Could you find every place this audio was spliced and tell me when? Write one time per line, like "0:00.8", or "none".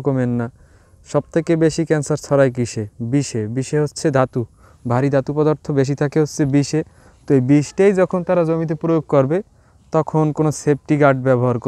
none

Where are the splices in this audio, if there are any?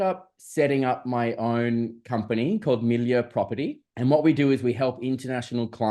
0:03.8

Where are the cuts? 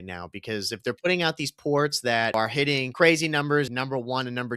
0:02.6
0:03.7

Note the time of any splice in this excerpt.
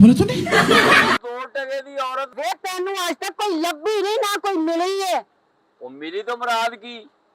0:02.3

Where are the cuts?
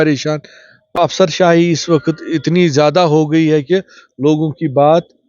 0:00.9

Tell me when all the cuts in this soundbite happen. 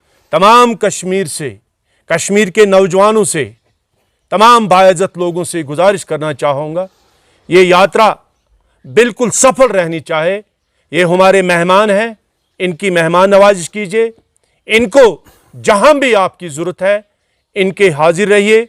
none

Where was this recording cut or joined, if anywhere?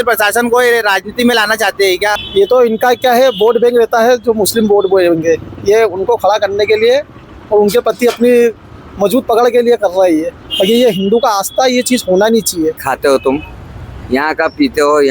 0:02.2
0:12.9

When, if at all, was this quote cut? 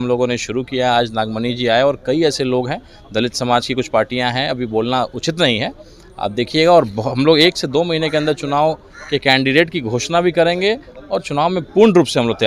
none

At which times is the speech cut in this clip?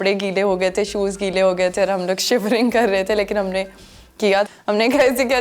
0:04.5

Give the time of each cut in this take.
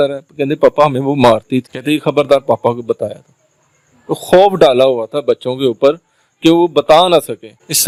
none

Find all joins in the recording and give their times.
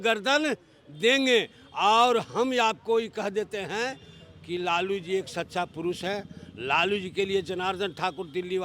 none

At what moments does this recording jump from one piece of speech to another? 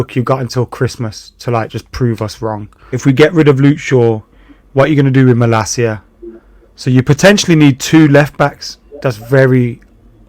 0:03.0

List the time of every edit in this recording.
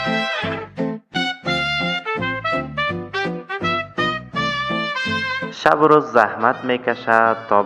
0:01.2

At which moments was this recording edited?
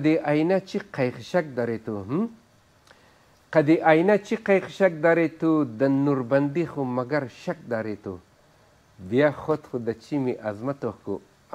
none

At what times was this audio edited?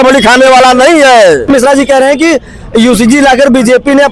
0:01.5

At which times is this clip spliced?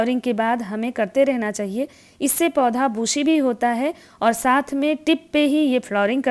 none

